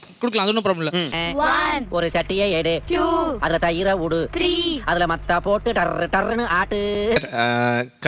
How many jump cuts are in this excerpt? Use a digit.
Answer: 1